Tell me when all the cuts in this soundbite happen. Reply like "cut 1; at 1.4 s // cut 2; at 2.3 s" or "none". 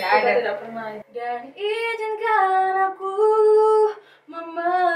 cut 1; at 1.0 s